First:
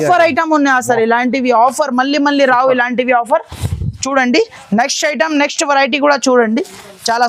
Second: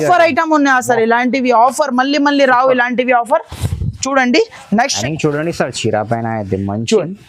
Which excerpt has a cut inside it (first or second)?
second